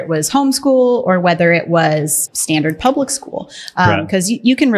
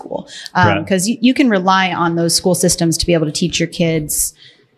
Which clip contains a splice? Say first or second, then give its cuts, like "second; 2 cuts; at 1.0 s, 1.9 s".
first; 1 cut; at 2.2 s